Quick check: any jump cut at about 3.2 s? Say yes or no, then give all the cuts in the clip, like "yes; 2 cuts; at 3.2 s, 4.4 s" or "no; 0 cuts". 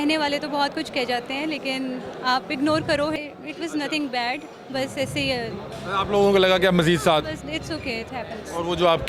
yes; 1 cut; at 3.2 s